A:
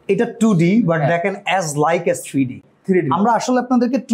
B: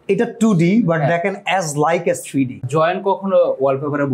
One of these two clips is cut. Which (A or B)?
B